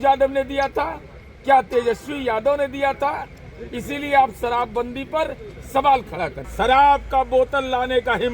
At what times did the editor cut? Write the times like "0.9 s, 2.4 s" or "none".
6.4 s

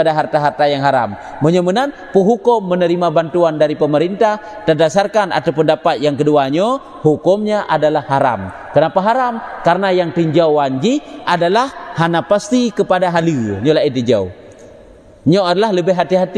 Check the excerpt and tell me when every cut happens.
none

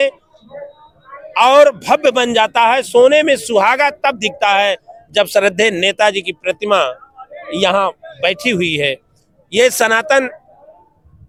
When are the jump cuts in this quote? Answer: none

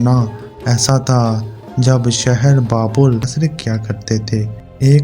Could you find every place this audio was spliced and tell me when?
3.3 s

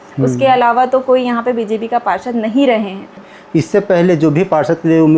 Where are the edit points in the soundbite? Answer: 3.3 s

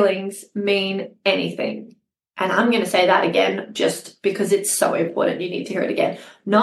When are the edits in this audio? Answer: none

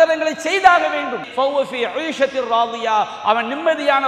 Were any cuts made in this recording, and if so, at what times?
1.2 s

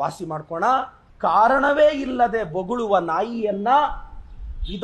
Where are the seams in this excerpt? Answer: 1.0 s

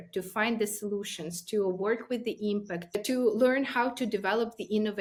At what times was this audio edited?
none

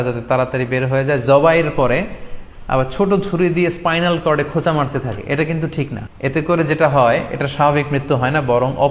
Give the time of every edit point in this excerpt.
6.0 s

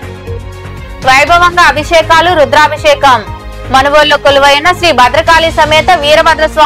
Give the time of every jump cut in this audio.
1.0 s

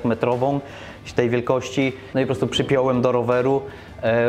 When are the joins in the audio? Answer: 2.0 s

